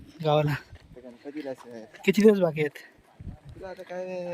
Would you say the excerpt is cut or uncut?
uncut